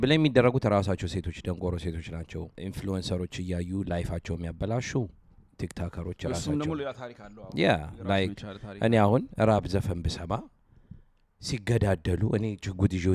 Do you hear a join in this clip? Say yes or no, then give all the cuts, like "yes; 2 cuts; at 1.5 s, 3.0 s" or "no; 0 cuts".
yes; 1 cut; at 2.5 s